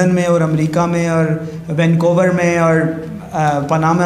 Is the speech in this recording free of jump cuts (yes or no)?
yes